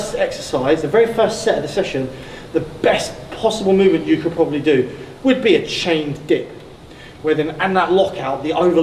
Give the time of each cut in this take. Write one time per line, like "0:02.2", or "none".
none